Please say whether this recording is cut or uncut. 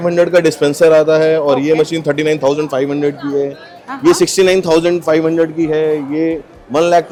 uncut